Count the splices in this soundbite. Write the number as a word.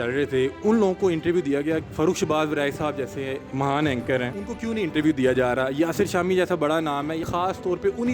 four